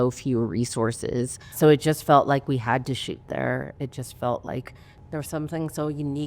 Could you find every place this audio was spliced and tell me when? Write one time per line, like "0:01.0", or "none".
0:01.5
0:04.9